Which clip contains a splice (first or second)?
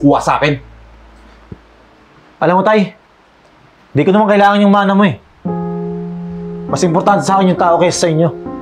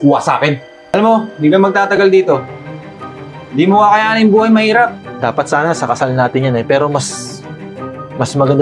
second